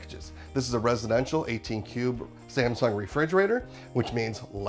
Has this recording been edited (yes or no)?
yes